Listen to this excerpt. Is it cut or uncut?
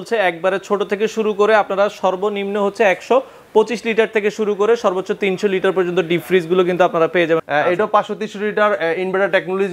cut